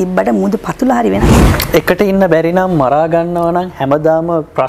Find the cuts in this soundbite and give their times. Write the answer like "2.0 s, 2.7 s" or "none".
1.5 s